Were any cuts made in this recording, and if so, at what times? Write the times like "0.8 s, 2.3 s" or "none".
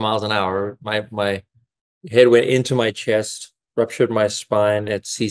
none